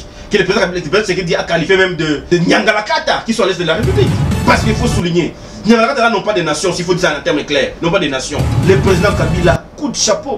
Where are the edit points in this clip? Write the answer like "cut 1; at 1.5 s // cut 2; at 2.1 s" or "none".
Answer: cut 1; at 4.2 s // cut 2; at 8.5 s